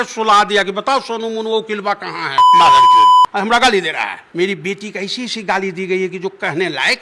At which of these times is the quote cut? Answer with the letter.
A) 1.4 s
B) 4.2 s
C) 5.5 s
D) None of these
B